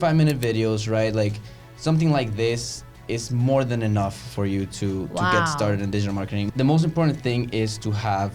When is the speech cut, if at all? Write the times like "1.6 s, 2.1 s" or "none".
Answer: 6.5 s